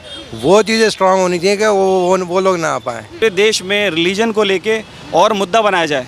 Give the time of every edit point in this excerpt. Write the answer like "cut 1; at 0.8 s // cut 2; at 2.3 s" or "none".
cut 1; at 3.2 s